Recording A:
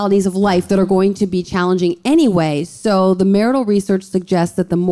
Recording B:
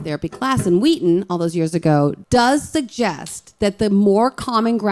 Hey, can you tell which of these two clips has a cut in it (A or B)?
B